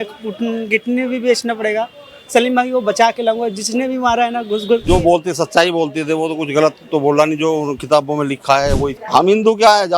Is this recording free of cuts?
no; 2 cuts; at 4.8 s, 9.0 s

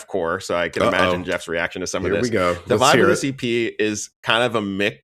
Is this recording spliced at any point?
no; 0 cuts

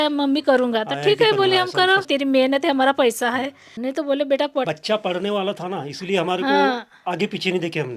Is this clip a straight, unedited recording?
no; 3 cuts; at 2.1 s, 3.6 s, 4.7 s

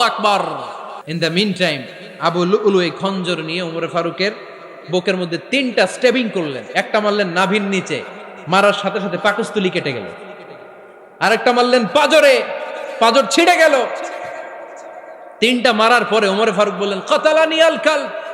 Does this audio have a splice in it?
yes; 1 cut; at 1.0 s

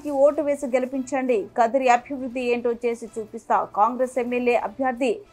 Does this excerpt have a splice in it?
no; 0 cuts

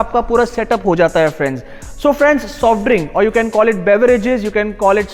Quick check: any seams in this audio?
no; 0 cuts

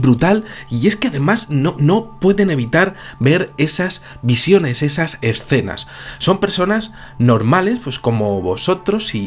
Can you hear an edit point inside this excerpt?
no; 0 cuts

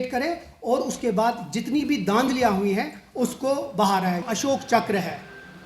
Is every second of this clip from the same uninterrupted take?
no; 1 cut; at 4.2 s

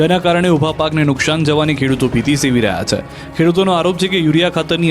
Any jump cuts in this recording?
yes; 1 cut; at 0.9 s

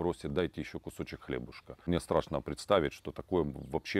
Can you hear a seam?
yes; 1 cut; at 1.9 s

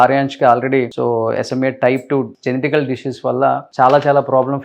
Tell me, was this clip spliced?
yes; 2 cuts; at 0.9 s, 2.3 s

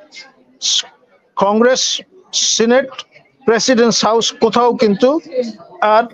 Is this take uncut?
yes; 0 cuts

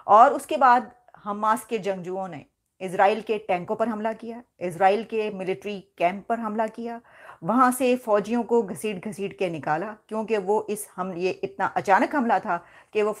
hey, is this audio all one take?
yes; 0 cuts

